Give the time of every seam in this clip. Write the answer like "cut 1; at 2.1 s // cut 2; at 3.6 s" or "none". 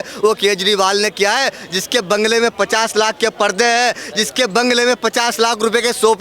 none